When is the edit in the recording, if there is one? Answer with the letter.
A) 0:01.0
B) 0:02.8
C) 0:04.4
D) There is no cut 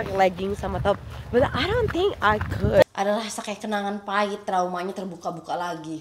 B